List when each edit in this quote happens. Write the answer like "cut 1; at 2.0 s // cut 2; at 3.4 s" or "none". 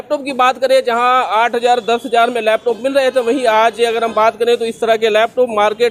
none